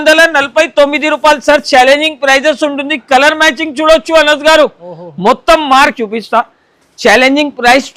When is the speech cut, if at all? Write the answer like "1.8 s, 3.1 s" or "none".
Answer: 5.9 s